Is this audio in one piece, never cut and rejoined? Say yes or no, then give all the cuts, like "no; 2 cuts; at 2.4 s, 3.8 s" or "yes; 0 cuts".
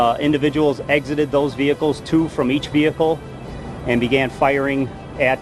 yes; 0 cuts